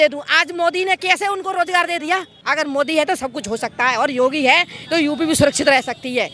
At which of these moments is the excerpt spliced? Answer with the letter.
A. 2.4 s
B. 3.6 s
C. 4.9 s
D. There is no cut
A